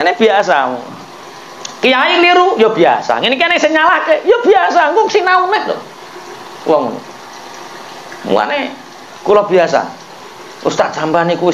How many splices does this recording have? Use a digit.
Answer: 0